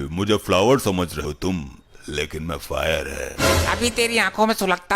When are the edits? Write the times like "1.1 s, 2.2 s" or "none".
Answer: 1.2 s